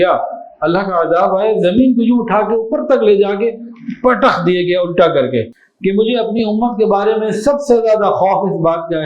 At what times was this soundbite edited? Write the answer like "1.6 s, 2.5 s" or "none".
5.6 s